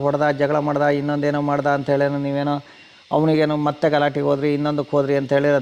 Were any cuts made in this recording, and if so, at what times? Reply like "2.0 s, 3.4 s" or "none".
none